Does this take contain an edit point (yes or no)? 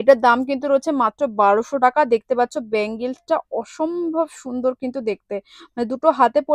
no